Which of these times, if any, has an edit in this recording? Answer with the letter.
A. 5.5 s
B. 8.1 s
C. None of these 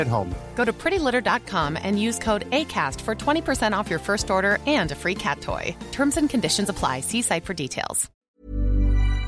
B